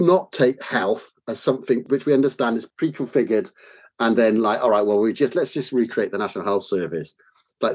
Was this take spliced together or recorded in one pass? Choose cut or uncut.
cut